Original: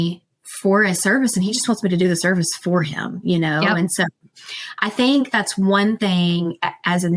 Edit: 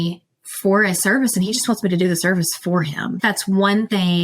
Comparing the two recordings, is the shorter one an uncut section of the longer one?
no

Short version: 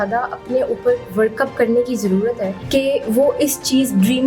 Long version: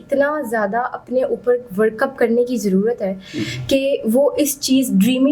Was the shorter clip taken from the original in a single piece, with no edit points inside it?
no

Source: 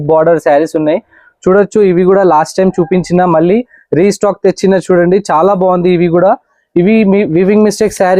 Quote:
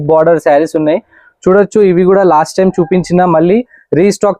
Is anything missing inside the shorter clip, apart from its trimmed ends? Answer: no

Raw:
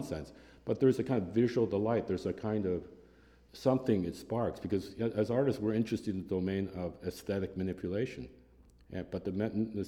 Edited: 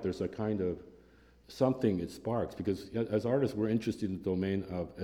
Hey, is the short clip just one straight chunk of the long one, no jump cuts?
yes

